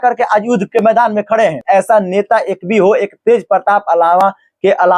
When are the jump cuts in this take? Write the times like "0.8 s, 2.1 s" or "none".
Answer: 1.6 s